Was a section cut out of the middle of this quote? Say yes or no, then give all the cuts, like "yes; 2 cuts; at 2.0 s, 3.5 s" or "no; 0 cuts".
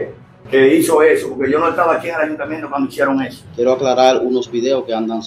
yes; 1 cut; at 3.4 s